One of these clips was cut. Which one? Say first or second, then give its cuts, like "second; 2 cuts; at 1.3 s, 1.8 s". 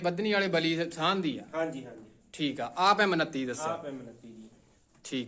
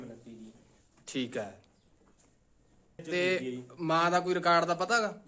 second; 1 cut; at 3.0 s